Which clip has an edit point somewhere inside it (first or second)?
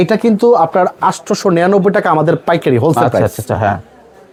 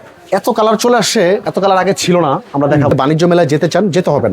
second